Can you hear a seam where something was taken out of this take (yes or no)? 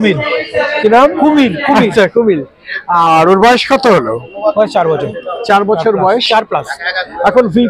no